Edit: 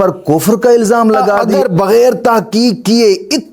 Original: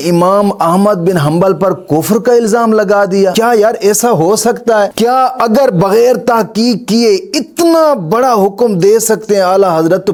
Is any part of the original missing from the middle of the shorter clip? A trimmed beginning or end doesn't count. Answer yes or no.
yes